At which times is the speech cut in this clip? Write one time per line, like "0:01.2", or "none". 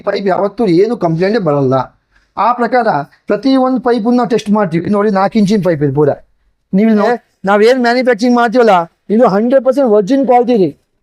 0:07.0